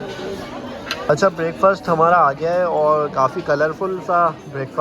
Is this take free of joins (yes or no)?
no